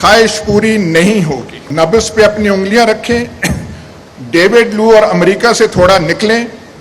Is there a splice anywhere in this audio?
yes; 1 cut; at 1.6 s

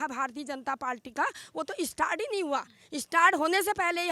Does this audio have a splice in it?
no; 0 cuts

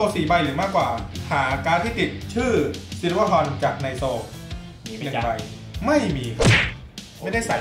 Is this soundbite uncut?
yes; 0 cuts

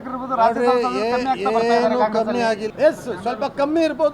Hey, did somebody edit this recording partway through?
yes; 1 cut; at 2.7 s

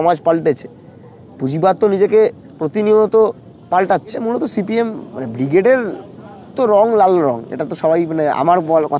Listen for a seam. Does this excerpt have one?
yes; 1 cut; at 4.2 s

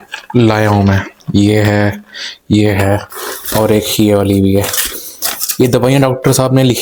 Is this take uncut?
yes; 0 cuts

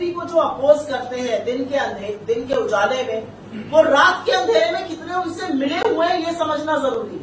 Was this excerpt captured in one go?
yes; 0 cuts

